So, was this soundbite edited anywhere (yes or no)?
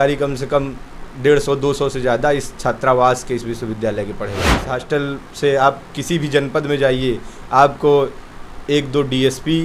yes